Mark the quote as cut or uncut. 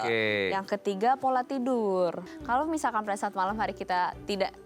cut